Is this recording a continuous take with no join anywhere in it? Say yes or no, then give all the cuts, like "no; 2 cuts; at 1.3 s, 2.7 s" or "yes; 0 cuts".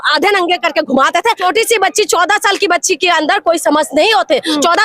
no; 1 cut; at 1.4 s